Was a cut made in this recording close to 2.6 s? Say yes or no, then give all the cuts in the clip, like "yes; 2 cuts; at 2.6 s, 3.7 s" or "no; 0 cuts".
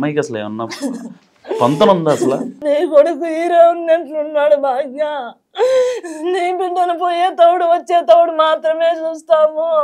yes; 1 cut; at 2.6 s